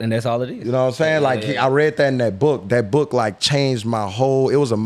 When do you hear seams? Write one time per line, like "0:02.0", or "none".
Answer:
none